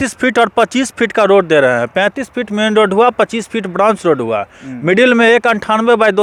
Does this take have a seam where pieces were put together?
no; 0 cuts

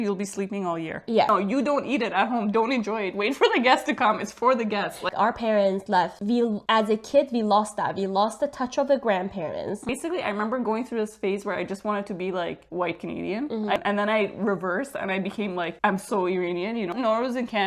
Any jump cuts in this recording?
yes; 5 cuts; at 1.3 s, 5.1 s, 9.9 s, 13.8 s, 16.9 s

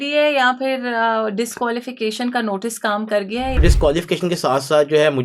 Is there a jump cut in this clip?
yes; 1 cut; at 3.6 s

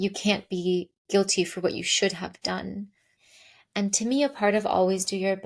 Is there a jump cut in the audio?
no; 0 cuts

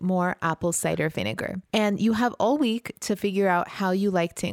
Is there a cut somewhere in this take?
no; 0 cuts

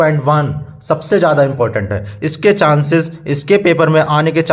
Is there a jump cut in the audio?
no; 0 cuts

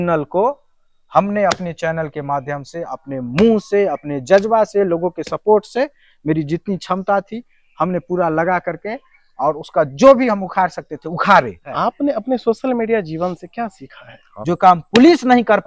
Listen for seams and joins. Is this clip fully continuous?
no; 2 cuts; at 11.8 s, 14.4 s

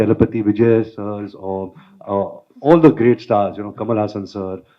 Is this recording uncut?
yes; 0 cuts

